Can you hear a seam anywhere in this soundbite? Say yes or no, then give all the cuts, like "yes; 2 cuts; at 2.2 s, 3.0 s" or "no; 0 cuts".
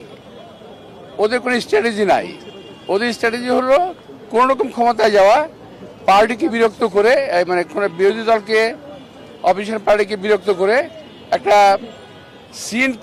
no; 0 cuts